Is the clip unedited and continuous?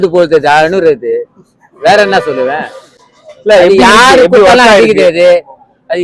yes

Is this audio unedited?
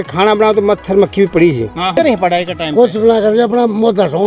no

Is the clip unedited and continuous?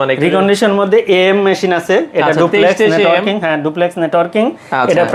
yes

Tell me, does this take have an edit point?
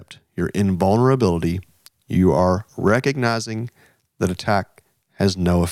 no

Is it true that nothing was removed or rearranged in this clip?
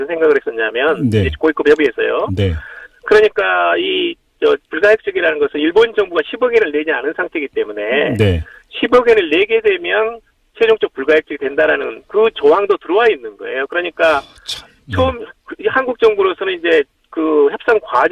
no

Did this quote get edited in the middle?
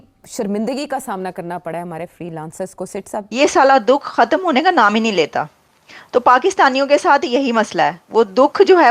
yes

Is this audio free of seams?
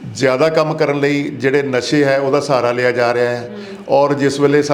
yes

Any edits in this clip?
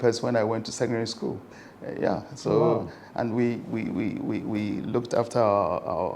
no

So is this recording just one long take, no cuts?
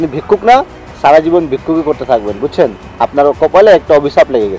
yes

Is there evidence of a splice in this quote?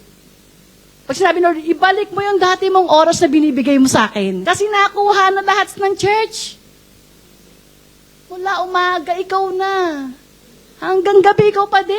yes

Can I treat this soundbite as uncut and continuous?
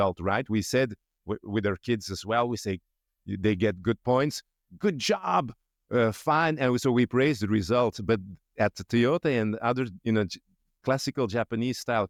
yes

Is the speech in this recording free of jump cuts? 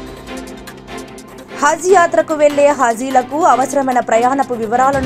no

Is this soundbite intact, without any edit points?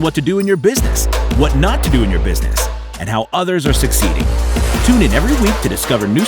yes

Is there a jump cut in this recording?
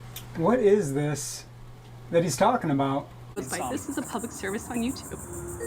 yes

